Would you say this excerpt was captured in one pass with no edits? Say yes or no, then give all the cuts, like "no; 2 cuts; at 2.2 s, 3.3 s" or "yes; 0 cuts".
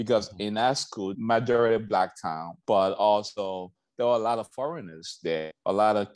no; 2 cuts; at 1.1 s, 2.5 s